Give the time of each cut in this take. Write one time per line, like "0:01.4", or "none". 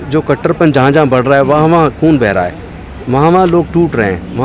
none